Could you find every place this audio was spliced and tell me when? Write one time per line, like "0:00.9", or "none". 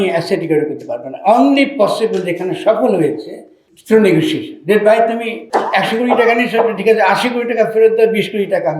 0:05.4

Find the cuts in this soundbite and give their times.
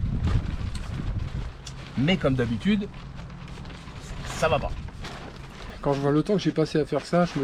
0:05.7

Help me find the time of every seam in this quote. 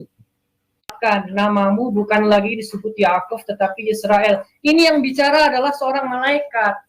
0:00.9

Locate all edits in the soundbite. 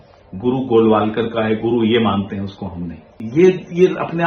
0:03.1

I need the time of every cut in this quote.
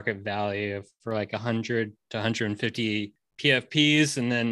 0:03.2

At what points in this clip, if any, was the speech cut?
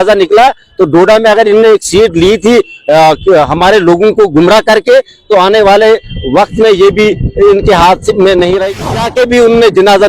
0:08.9

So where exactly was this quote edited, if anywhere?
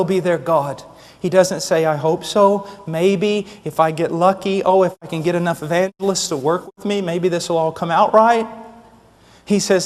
0:08.1

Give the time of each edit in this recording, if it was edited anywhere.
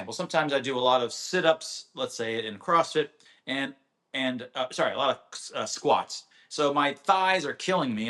none

